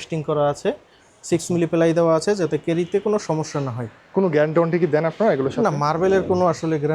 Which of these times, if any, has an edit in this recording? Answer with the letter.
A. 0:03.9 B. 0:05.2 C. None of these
C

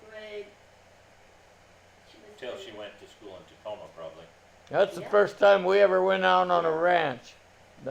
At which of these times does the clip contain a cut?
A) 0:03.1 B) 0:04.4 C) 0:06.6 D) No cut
D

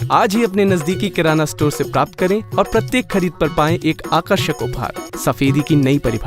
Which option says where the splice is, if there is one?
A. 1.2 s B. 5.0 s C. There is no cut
B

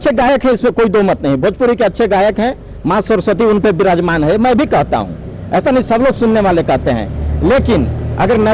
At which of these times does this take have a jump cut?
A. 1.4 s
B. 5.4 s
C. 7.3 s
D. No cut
D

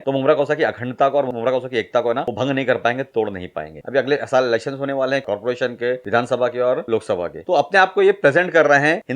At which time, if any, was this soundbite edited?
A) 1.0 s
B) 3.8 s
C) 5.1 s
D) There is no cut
B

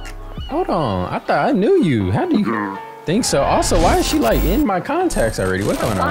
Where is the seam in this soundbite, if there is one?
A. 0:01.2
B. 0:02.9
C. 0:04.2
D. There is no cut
D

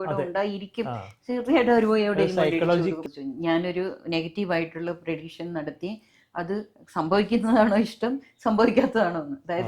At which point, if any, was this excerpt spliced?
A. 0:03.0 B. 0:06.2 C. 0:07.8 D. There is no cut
A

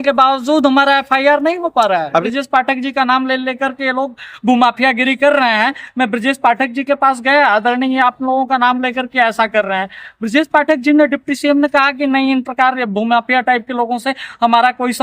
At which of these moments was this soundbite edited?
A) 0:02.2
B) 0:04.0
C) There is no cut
A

